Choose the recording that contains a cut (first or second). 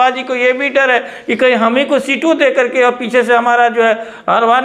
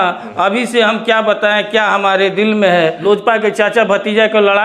second